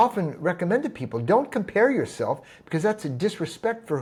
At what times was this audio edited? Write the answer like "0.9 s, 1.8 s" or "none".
none